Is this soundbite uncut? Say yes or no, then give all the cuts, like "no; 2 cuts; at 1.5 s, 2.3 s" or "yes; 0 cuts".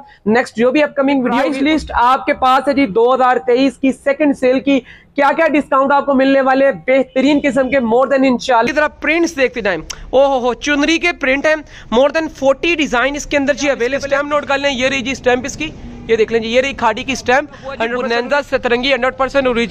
no; 4 cuts; at 1.5 s, 8.7 s, 14.0 s, 18.0 s